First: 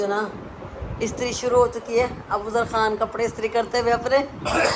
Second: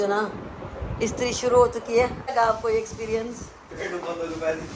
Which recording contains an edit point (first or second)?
second